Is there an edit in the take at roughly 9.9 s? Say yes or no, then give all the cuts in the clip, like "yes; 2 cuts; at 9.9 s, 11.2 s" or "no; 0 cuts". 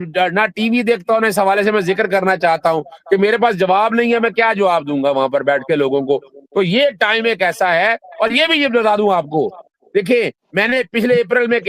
no; 0 cuts